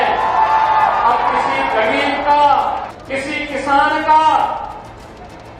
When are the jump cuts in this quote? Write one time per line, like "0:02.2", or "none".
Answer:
0:02.9